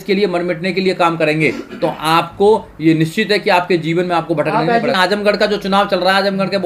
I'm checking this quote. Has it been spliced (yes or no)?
yes